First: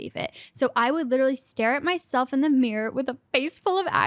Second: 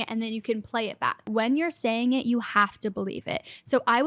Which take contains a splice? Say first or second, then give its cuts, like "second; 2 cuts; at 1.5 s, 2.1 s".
second; 1 cut; at 1.3 s